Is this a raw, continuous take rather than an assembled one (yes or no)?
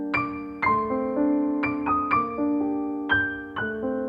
yes